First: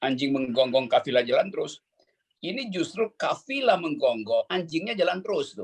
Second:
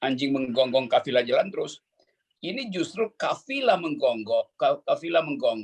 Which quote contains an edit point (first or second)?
first